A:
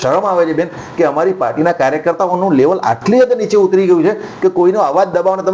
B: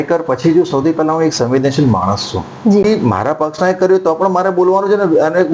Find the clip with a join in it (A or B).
B